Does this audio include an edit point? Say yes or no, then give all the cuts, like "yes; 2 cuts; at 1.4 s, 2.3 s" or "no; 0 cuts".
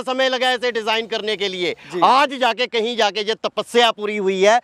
no; 0 cuts